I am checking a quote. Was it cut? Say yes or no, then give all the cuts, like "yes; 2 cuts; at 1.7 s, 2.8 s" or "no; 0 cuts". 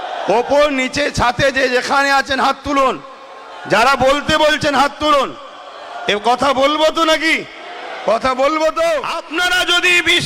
yes; 1 cut; at 9.2 s